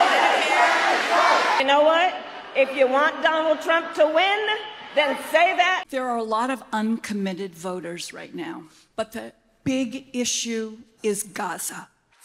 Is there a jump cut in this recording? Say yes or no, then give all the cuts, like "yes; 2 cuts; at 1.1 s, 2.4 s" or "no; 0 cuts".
yes; 3 cuts; at 1.6 s, 5.9 s, 8.8 s